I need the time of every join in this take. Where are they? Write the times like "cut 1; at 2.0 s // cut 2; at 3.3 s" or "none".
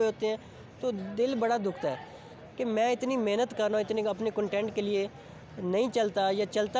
cut 1; at 2.0 s